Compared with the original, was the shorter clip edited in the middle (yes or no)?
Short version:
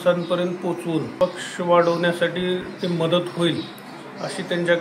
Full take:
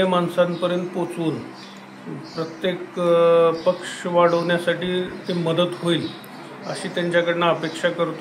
yes